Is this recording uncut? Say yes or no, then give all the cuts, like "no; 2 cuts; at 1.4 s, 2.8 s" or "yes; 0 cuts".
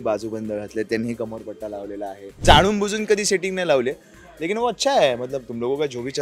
no; 1 cut; at 2.4 s